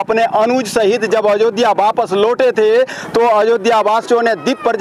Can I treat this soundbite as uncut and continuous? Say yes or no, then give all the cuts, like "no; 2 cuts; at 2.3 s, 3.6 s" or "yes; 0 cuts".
yes; 0 cuts